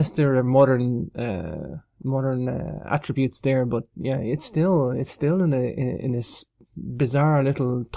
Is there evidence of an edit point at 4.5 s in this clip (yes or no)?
yes